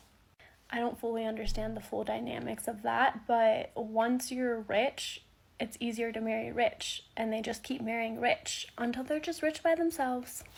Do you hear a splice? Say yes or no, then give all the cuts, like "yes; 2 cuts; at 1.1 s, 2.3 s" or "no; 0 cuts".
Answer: no; 0 cuts